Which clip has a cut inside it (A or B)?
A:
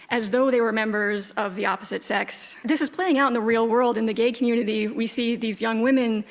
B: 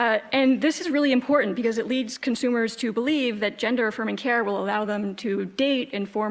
A